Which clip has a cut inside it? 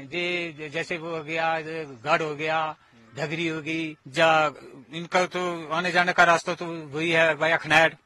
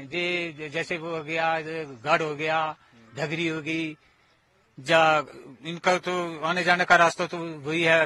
first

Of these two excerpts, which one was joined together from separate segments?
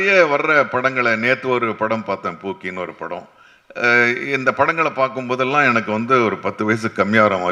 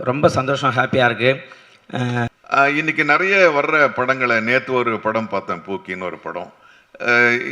second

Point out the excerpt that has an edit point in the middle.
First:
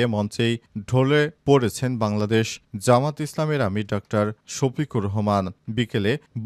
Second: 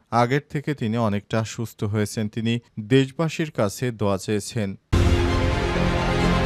second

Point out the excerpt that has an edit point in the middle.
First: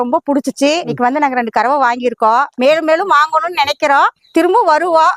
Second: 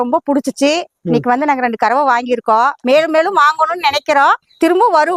first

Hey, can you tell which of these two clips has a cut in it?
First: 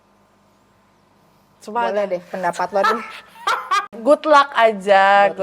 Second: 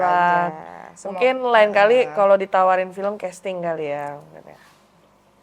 first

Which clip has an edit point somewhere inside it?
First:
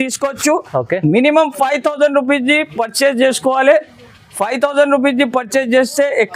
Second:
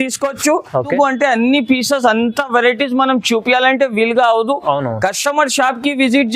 second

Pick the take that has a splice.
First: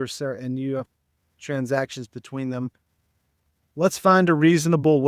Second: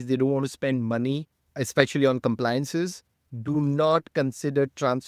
second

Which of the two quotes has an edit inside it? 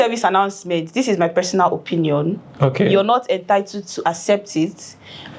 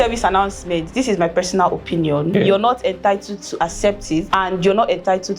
second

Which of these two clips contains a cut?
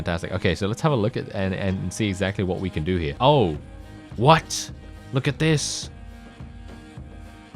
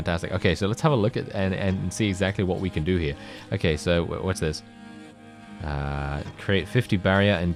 first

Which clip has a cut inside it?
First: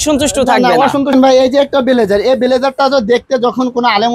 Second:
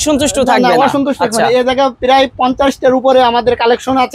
first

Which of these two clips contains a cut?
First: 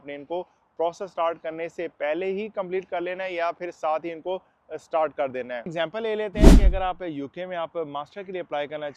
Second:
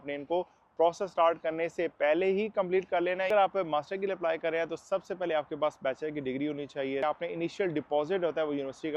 second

